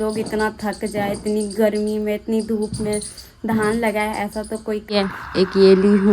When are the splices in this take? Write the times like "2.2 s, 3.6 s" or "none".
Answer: 4.9 s